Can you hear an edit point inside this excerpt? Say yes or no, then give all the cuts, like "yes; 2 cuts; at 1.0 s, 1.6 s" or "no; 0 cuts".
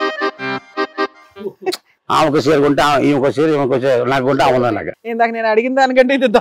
no; 0 cuts